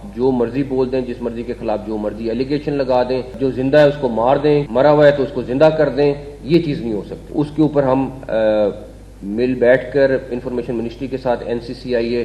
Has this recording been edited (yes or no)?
yes